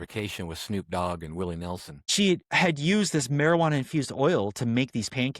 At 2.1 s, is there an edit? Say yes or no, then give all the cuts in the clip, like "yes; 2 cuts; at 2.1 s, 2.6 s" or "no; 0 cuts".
yes; 1 cut; at 2.1 s